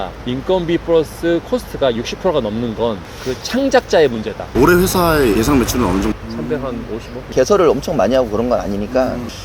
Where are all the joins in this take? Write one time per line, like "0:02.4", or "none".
0:04.5

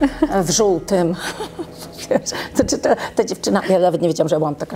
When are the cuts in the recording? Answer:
none

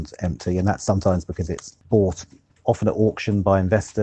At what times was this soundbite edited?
0:01.7

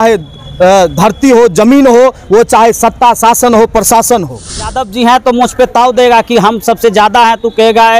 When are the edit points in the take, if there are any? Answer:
0:04.7

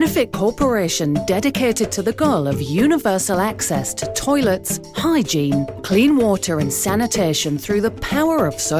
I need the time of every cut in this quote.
none

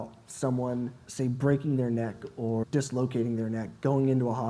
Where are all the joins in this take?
0:01.0
0:02.6

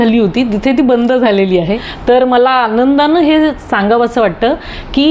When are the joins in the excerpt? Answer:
0:01.9

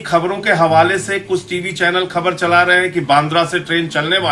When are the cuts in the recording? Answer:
none

